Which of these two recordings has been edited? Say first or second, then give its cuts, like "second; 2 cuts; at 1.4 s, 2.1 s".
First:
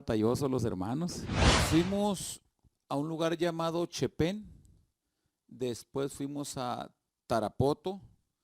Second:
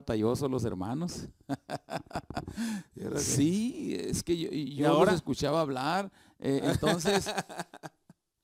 first; 1 cut; at 1.3 s